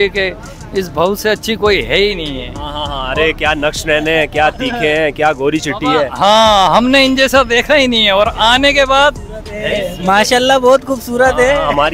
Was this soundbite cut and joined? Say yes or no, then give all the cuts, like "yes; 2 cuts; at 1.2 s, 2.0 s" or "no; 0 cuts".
no; 0 cuts